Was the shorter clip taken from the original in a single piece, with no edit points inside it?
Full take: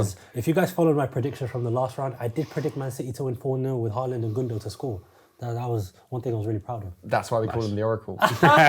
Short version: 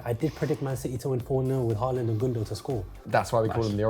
no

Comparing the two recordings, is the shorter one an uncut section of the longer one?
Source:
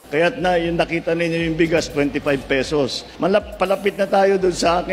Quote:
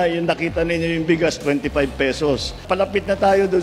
no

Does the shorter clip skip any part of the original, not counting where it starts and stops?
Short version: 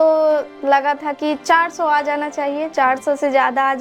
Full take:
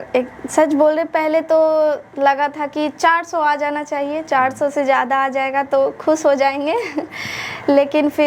no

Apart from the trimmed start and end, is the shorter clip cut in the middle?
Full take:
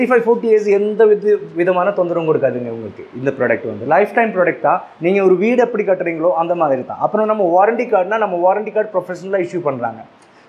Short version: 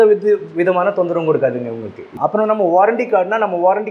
yes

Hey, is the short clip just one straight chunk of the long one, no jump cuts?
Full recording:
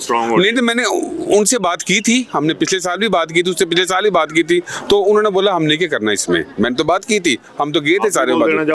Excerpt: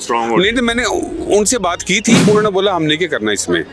no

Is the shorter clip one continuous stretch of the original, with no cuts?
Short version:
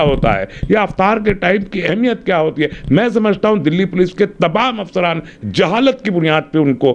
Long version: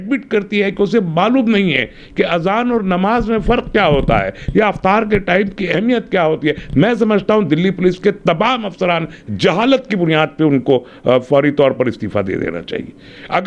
yes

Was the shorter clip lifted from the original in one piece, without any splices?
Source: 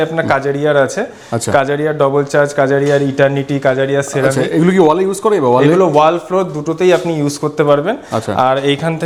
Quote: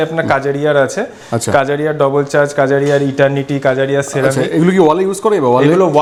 yes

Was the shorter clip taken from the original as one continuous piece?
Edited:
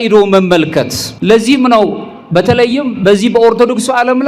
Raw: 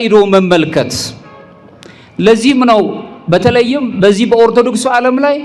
no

